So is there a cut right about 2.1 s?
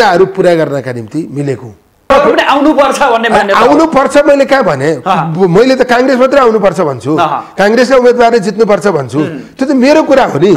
yes; 1 cut; at 2.1 s

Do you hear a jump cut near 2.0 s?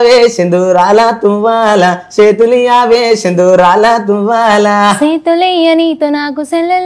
no; 0 cuts

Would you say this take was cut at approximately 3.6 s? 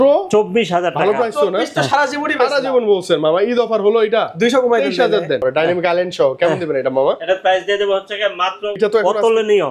no; 2 cuts; at 5.4 s, 8.8 s

